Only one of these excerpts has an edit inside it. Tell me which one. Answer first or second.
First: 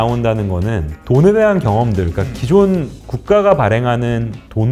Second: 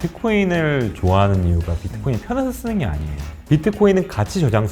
second